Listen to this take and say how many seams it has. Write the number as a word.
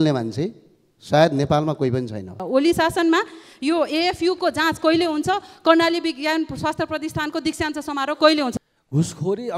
two